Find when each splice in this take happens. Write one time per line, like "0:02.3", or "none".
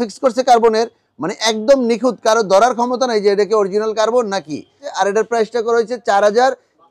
0:04.9